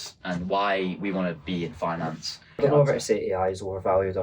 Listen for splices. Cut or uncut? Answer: cut